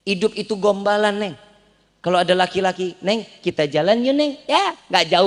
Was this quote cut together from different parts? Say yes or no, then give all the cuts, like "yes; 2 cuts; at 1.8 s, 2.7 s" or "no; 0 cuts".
no; 0 cuts